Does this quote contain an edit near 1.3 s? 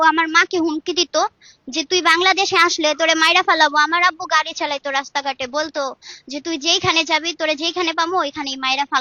no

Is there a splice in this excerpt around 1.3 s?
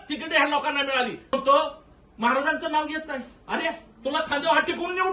yes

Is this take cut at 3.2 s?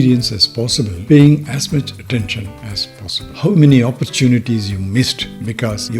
yes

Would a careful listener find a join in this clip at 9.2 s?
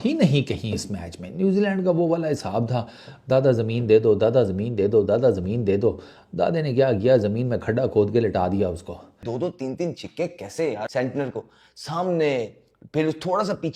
yes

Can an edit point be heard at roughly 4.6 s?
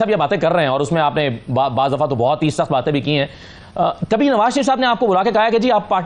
no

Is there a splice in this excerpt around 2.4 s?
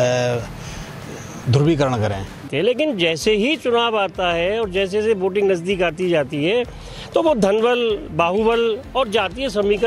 yes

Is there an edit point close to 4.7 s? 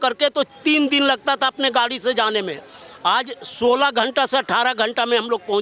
no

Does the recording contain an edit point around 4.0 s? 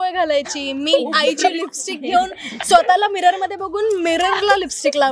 no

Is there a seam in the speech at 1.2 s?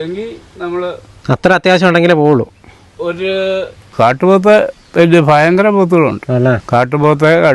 no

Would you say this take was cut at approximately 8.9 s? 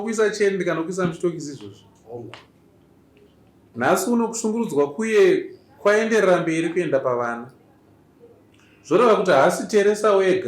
no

